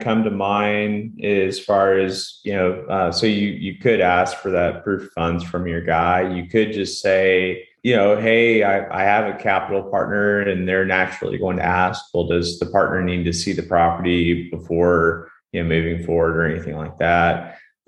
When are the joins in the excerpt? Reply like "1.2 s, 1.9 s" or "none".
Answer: 7.7 s